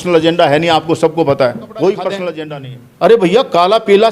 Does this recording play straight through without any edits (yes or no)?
no